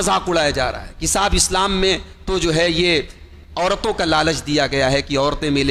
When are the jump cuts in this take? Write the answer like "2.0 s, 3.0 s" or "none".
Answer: none